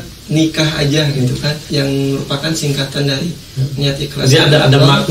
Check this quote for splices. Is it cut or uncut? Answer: cut